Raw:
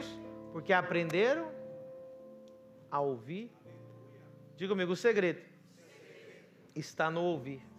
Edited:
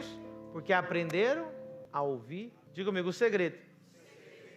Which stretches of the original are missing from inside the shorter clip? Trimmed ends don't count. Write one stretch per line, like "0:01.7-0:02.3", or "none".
0:01.8-0:02.8
0:03.6-0:04.4